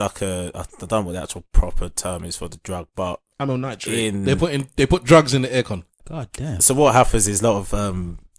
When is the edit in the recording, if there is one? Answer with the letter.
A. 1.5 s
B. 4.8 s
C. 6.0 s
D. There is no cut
C